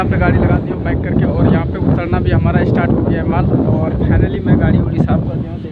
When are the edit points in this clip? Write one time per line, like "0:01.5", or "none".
none